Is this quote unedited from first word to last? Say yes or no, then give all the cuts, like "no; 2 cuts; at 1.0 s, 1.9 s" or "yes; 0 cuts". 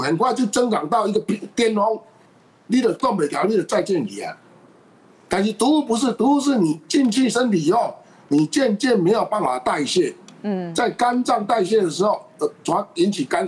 yes; 0 cuts